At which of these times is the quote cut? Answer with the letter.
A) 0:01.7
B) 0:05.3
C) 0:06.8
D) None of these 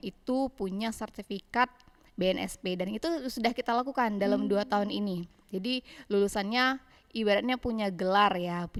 D